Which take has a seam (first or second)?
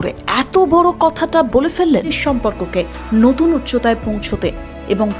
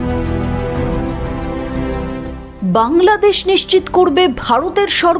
first